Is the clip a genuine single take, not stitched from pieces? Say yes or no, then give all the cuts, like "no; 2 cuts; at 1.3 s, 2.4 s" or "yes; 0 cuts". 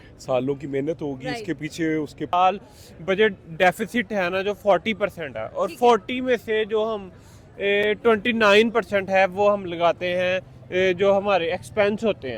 no; 1 cut; at 2.3 s